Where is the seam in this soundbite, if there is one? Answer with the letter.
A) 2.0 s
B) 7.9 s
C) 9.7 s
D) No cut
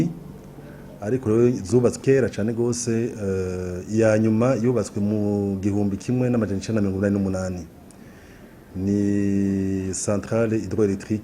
A